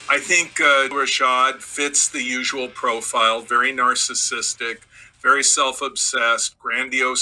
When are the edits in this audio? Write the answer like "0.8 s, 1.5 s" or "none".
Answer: 0.9 s